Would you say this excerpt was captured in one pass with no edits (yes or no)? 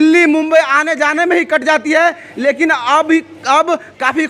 yes